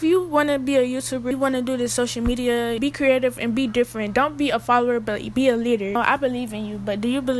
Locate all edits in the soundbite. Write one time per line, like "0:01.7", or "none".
0:01.3
0:02.8
0:06.0